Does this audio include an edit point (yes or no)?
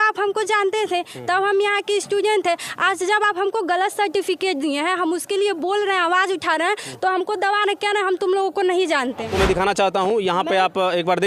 yes